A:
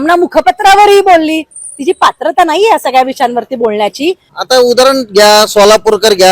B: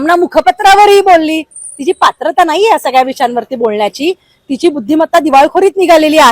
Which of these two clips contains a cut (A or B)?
A